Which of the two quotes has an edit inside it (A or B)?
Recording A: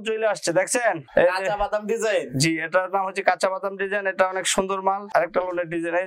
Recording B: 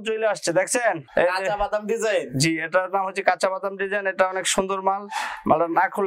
A